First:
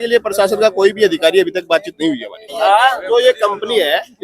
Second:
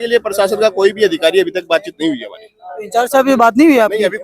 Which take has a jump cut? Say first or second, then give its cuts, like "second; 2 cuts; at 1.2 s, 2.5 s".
first; 1 cut; at 2.9 s